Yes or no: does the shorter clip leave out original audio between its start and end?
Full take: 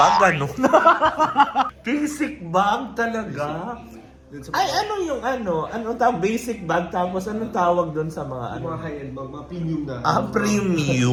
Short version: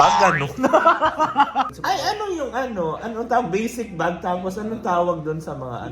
yes